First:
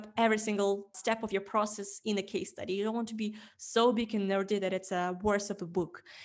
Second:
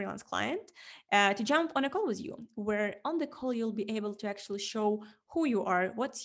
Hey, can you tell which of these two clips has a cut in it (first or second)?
first